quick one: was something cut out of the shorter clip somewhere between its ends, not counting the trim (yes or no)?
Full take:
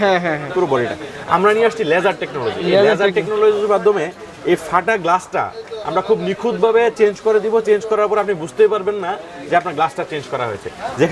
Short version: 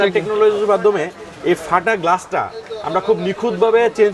no